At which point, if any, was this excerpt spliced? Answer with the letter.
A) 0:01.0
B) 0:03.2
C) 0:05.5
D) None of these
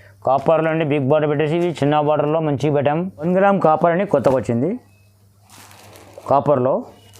B